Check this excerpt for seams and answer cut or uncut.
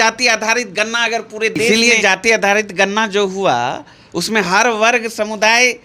cut